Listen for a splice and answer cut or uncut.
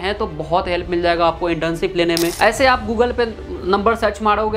cut